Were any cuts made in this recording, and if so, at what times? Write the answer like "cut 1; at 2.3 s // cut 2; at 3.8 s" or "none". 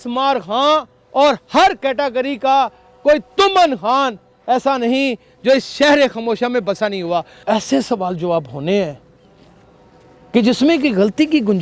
cut 1; at 7.3 s